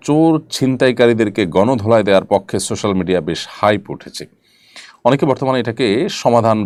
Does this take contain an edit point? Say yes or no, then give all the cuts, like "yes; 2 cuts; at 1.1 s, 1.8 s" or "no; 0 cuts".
no; 0 cuts